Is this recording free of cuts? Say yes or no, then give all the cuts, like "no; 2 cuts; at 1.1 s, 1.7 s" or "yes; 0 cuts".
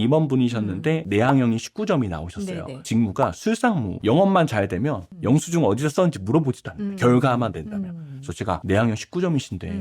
no; 4 cuts; at 1.0 s, 2.9 s, 3.9 s, 8.6 s